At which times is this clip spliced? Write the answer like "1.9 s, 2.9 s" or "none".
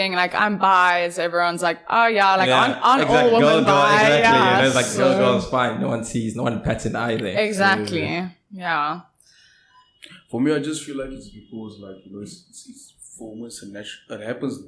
none